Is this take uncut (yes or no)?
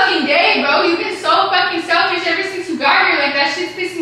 yes